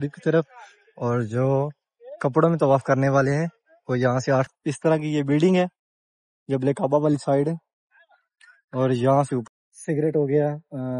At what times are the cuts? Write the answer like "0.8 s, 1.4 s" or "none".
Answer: 4.5 s, 9.4 s